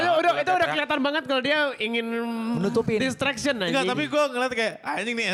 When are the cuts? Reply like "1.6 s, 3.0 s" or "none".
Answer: none